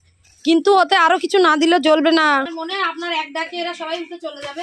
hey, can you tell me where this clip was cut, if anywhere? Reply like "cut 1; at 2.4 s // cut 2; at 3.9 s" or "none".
cut 1; at 2.5 s